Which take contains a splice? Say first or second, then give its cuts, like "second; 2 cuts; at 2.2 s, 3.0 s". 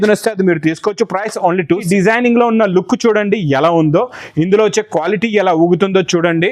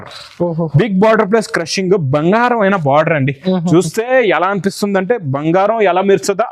first; 1 cut; at 1.9 s